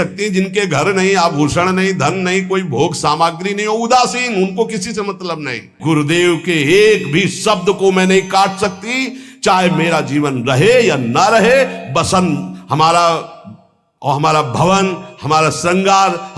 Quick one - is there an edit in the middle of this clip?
yes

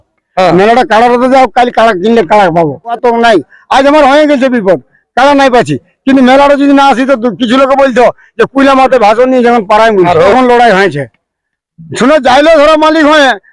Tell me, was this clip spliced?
yes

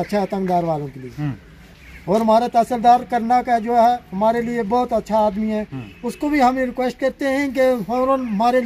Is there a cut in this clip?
no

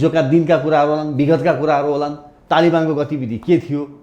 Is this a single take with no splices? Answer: yes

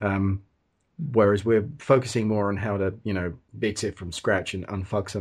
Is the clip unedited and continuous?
no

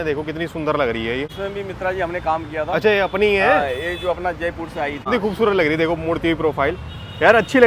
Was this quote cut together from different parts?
yes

